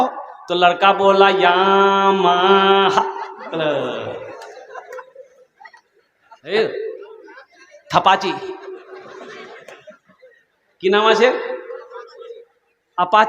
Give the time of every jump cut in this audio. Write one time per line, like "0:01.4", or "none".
0:06.5